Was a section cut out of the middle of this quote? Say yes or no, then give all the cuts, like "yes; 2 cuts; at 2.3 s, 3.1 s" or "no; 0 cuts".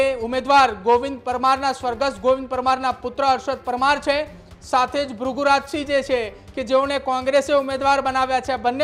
no; 0 cuts